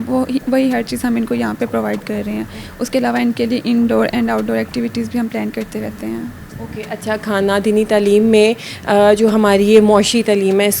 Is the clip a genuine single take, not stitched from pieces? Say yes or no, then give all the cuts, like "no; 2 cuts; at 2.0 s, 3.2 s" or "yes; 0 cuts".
yes; 0 cuts